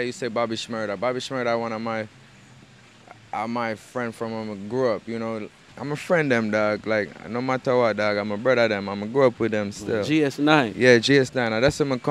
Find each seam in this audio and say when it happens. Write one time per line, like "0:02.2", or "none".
0:05.7